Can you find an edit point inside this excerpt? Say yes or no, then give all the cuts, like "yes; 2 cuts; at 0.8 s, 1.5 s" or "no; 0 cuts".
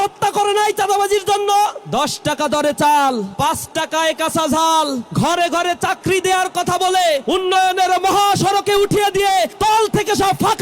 yes; 5 cuts; at 1.8 s, 3.3 s, 5.0 s, 7.2 s, 9.5 s